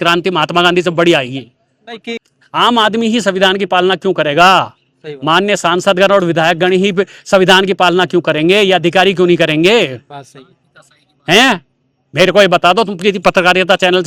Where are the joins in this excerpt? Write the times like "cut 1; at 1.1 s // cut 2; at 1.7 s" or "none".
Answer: cut 1; at 2.1 s